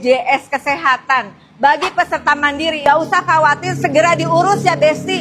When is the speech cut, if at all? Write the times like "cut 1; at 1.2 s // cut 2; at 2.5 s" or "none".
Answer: cut 1; at 2.8 s